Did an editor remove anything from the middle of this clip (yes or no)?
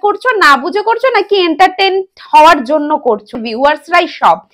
yes